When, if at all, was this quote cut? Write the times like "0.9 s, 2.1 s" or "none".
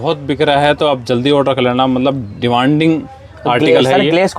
none